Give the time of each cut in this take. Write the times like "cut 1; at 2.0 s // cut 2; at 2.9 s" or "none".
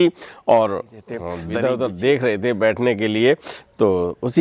cut 1; at 1.3 s

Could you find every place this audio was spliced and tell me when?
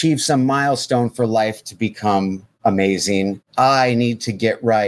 cut 1; at 2.5 s // cut 2; at 3.4 s

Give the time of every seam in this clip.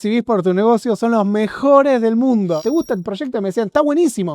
cut 1; at 2.6 s

